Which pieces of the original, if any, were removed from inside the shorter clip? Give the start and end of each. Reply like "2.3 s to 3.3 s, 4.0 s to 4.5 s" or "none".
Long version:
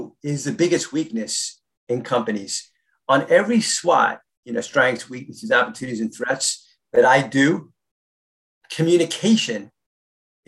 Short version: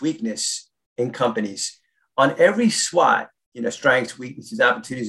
none